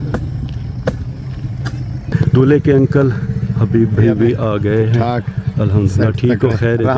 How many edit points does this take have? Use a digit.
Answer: 1